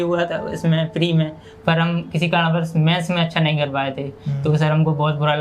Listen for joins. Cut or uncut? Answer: uncut